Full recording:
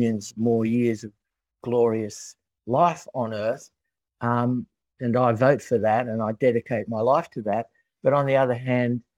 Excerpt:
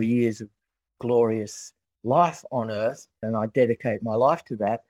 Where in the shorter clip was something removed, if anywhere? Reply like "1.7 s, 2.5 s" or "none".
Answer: 3.2 s